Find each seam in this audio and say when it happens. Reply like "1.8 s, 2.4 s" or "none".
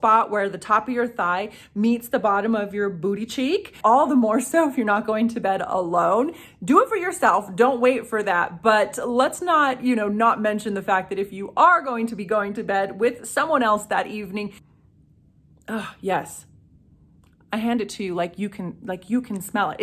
3.7 s, 14.6 s